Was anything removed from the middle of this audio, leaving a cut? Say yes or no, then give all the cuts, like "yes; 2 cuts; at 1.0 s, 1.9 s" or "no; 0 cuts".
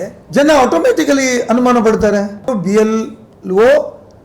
yes; 1 cut; at 2.5 s